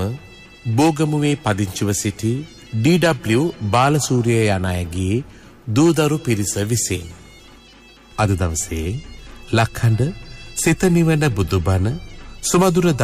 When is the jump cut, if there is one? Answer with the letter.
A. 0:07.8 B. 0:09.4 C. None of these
A